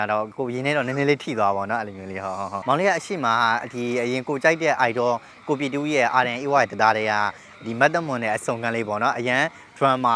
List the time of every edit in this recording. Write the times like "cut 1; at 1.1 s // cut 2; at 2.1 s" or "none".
cut 1; at 2.6 s